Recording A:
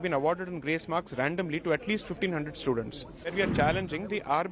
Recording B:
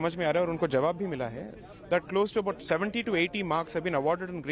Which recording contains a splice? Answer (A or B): A